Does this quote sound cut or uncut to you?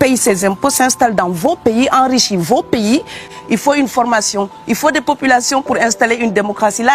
cut